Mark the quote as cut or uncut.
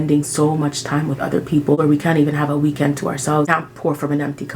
cut